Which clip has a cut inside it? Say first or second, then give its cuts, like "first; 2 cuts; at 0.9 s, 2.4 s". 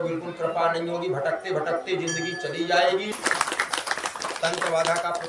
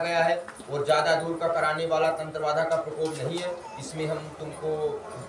first; 1 cut; at 3.1 s